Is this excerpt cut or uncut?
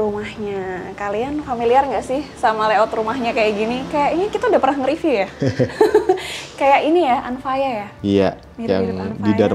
uncut